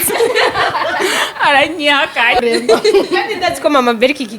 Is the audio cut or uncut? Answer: cut